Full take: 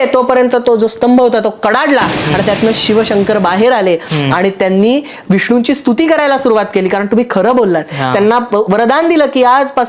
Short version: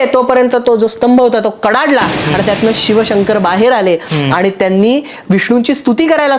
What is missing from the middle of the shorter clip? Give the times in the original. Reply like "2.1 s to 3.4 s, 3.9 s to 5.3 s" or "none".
none